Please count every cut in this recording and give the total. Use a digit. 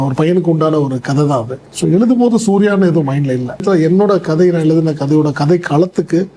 2